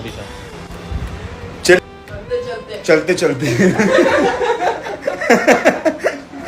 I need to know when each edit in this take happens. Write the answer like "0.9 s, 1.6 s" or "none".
1.8 s